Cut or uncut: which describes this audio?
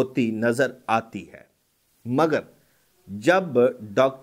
uncut